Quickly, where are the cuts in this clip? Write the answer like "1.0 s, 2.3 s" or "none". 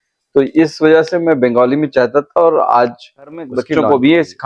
3.6 s